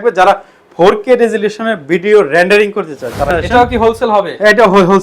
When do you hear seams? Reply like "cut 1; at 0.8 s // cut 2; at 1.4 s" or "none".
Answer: cut 1; at 3.3 s